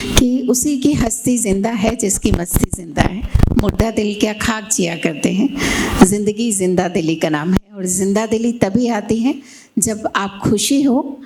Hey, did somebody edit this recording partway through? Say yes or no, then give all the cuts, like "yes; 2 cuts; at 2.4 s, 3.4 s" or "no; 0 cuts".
no; 0 cuts